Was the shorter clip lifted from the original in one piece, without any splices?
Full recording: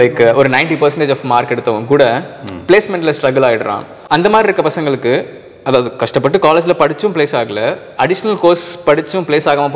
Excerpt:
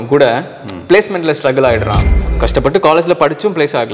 no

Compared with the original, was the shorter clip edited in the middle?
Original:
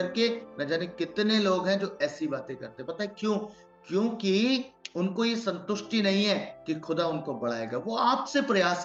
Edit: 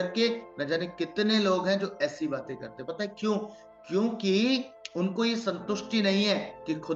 no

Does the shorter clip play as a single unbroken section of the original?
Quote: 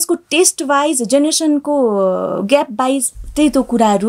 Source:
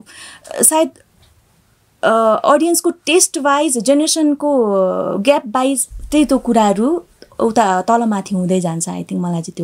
yes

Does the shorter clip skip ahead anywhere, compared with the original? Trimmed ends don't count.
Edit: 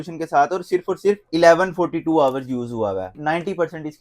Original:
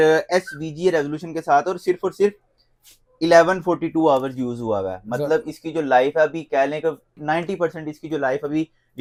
yes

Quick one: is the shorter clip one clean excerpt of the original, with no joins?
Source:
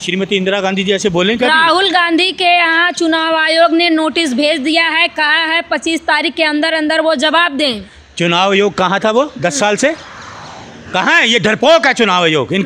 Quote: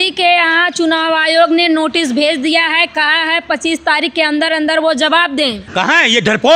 no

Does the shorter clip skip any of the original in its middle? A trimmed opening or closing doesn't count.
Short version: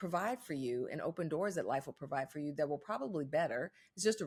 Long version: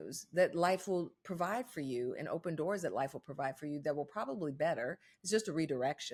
no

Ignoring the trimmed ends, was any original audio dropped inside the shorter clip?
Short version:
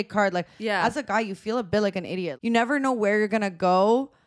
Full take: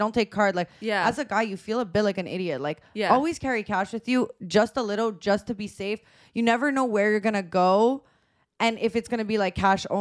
yes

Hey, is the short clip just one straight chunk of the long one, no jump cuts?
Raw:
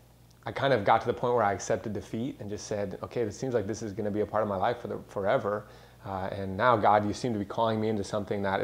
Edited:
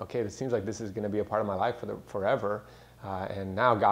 yes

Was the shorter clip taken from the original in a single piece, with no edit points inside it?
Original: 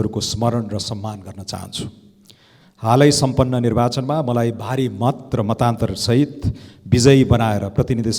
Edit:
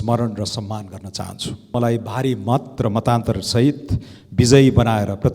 no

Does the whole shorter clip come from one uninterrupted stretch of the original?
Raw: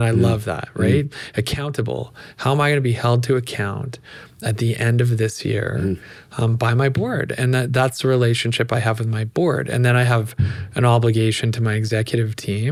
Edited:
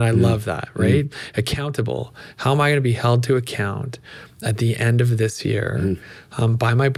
yes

